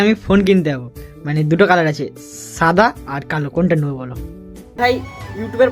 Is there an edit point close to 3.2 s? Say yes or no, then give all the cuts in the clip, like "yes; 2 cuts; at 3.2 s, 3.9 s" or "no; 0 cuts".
no; 1 cut; at 4.8 s